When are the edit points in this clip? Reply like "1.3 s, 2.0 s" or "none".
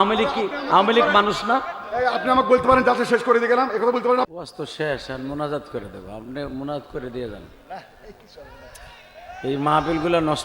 4.3 s